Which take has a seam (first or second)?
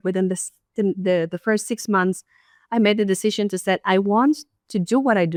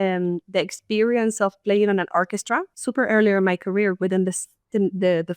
second